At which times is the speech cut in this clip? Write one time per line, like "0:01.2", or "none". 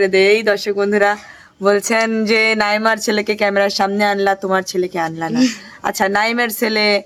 none

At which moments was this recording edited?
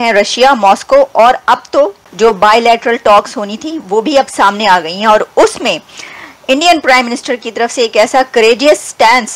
0:02.0

